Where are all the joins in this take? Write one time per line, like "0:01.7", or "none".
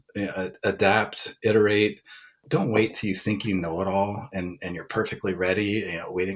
0:02.4